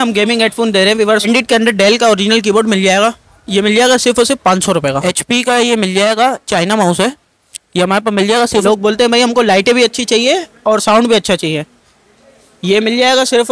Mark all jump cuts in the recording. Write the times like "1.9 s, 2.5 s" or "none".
1.3 s, 5.0 s, 8.6 s

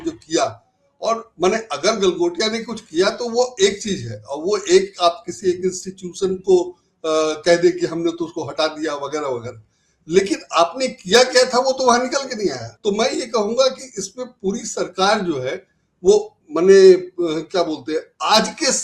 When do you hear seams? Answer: 12.7 s

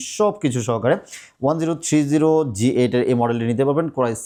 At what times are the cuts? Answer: none

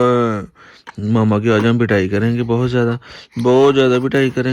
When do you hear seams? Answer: none

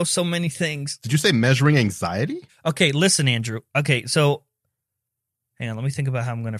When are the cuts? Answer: 0.9 s

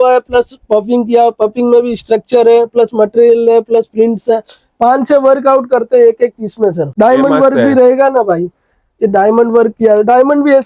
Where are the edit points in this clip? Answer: 6.8 s

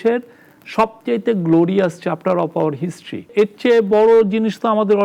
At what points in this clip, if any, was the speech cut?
3.3 s

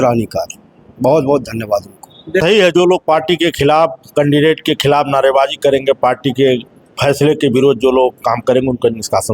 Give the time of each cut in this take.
2.4 s

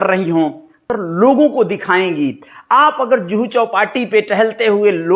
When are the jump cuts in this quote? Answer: 0.9 s

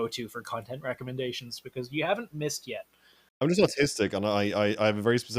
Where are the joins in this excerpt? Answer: 3.4 s

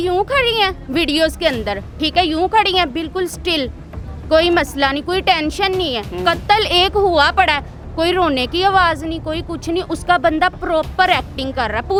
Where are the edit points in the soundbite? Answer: none

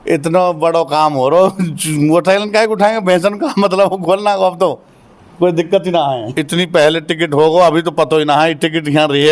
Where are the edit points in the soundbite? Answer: 6.3 s

